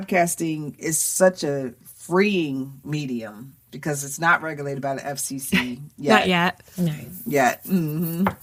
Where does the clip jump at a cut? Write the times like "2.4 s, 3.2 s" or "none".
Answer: none